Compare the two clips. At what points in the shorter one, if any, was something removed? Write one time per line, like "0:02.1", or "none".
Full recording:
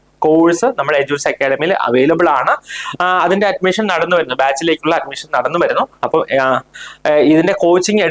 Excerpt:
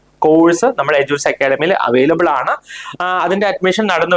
none